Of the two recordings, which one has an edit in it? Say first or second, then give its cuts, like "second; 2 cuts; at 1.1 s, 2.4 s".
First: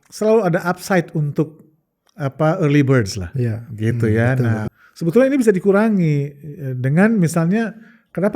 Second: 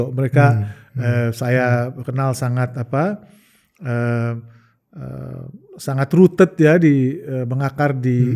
first; 1 cut; at 4.7 s